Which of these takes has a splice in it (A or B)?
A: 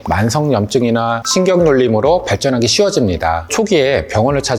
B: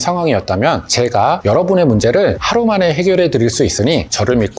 A